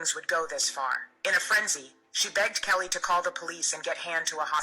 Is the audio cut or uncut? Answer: cut